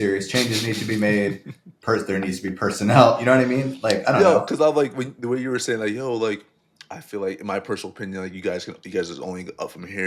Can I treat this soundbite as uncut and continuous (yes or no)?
yes